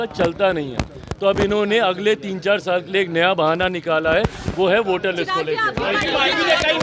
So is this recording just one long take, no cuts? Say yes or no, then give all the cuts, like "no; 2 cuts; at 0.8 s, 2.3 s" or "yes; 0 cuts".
yes; 0 cuts